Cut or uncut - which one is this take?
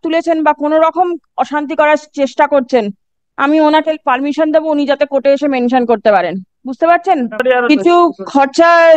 cut